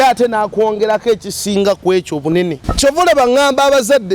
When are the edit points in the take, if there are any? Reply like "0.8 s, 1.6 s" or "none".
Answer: 2.6 s